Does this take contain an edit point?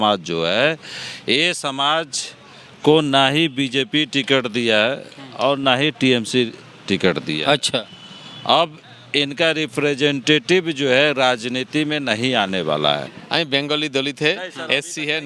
yes; 1 cut; at 13.1 s

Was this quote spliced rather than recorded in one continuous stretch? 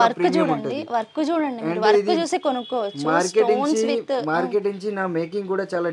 no; 0 cuts

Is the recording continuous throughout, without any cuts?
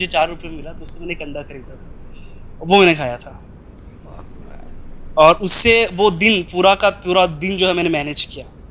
yes; 0 cuts

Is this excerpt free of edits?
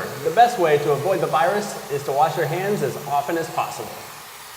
yes; 0 cuts

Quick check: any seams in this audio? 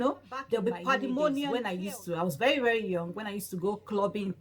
yes; 1 cut; at 1.5 s

